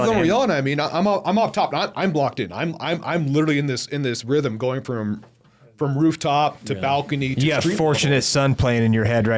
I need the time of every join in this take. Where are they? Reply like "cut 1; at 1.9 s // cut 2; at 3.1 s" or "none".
none